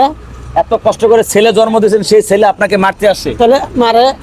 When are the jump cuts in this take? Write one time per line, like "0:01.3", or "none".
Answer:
none

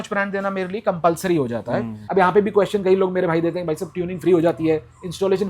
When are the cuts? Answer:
0:02.0

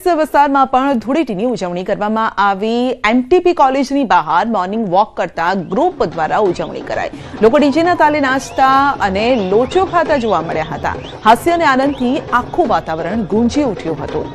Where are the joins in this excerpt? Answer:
0:02.4

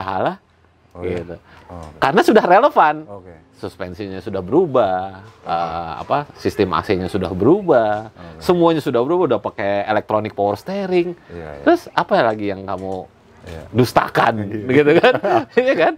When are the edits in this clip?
none

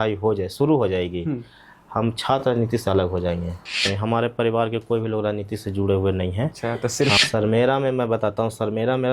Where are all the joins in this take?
0:03.9
0:07.2

